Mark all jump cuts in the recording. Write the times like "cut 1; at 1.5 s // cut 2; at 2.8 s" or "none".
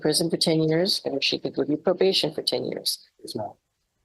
none